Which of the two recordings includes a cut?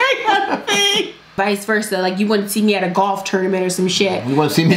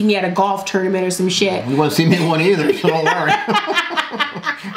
first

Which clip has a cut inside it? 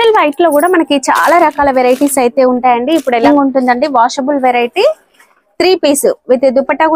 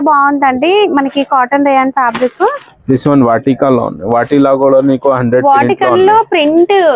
first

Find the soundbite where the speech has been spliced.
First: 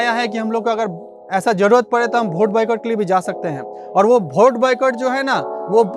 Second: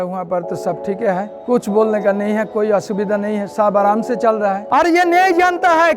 second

